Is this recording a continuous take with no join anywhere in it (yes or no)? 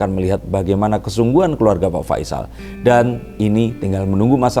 yes